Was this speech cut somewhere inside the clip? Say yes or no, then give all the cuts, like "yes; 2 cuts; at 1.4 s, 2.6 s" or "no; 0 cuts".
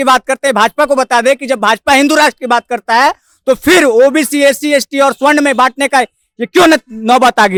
no; 0 cuts